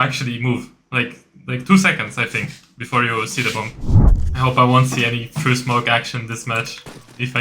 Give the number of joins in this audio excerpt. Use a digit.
1